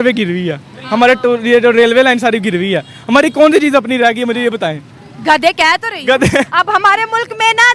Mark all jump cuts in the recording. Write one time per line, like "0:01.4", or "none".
none